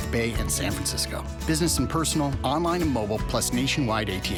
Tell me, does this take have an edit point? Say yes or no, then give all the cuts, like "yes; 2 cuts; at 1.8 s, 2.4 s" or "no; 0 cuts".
no; 0 cuts